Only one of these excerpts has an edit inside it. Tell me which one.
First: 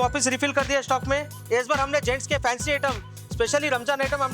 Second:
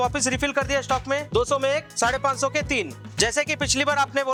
first; 1 cut; at 1.3 s

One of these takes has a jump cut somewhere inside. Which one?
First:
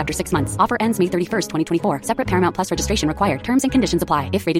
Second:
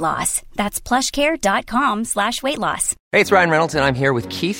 second; 1 cut; at 2.9 s

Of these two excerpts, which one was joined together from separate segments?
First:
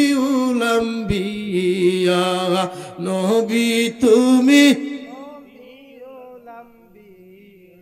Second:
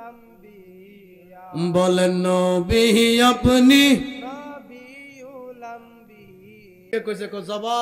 second; 1 cut; at 6.9 s

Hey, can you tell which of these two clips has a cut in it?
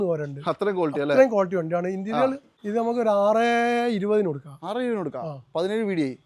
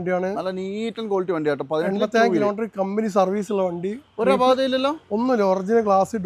first; 1 cut; at 2.5 s

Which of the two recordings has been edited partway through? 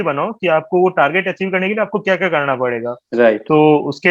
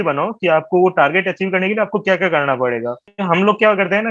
second; 1 cut; at 3.1 s

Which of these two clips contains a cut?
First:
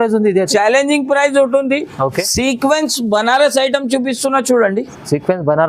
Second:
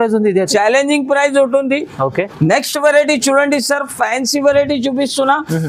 first; 1 cut; at 2.3 s

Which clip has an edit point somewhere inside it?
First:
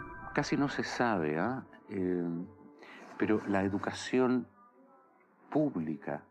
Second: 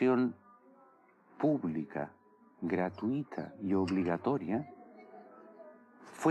first; 1 cut; at 2.9 s

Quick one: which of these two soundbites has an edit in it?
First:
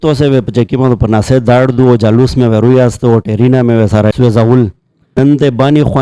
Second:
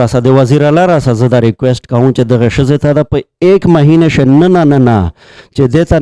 first; 2 cuts; at 4.1 s, 5.2 s

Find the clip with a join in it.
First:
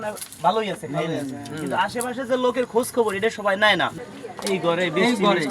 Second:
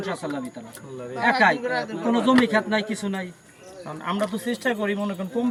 first; 1 cut; at 4.0 s

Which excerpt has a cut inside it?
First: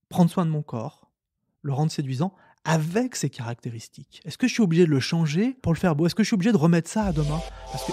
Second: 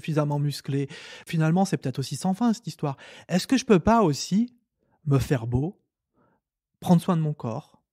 second; 1 cut; at 1.3 s

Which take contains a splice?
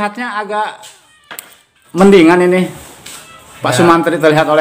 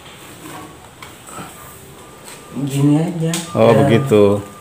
first; 1 cut; at 2.0 s

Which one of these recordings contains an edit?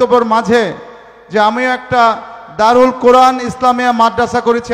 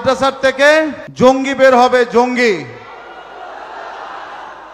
second; 1 cut; at 1.0 s

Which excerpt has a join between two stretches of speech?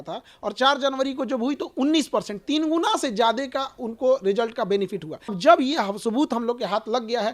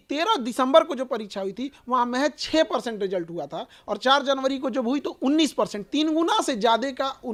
first; 1 cut; at 5.4 s

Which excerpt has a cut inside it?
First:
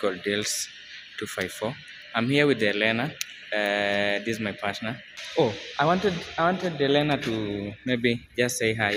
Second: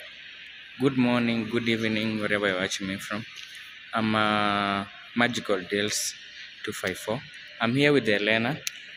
first; 1 cut; at 5.0 s

